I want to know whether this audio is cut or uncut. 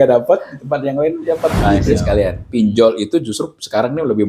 cut